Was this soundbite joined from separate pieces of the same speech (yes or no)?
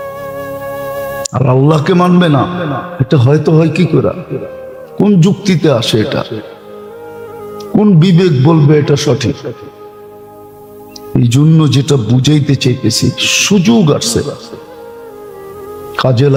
no